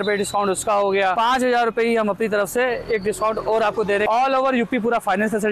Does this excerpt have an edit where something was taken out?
yes; 2 cuts; at 1.1 s, 4.1 s

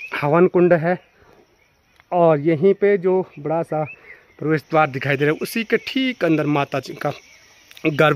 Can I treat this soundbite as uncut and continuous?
yes; 0 cuts

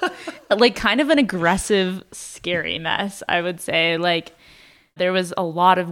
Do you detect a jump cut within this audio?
yes; 1 cut; at 5.0 s

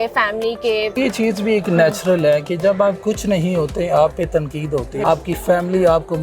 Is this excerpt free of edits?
no; 2 cuts; at 1.0 s, 5.0 s

